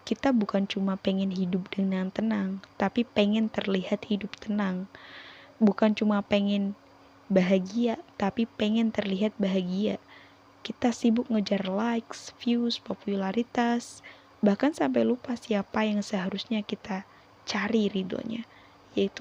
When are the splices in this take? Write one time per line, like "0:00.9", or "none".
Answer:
none